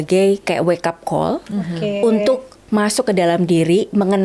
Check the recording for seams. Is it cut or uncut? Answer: uncut